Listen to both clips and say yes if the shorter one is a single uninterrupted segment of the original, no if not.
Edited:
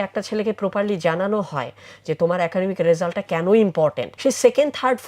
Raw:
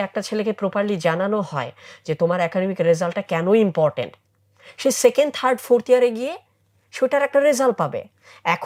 no